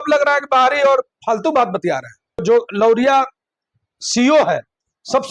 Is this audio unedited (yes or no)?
no